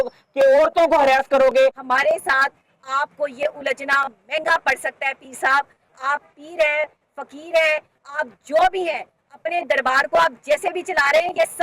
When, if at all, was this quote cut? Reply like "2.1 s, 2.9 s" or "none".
1.8 s